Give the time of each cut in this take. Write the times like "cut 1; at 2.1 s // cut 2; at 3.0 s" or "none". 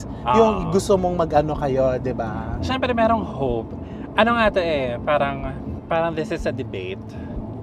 cut 1; at 5.7 s